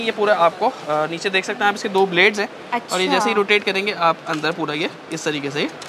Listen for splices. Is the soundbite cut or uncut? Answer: uncut